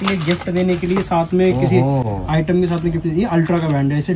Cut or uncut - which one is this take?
uncut